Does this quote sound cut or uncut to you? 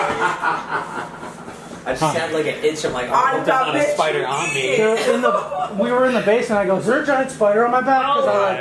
uncut